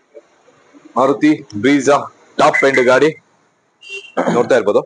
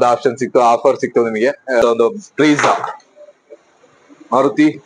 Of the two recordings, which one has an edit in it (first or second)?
second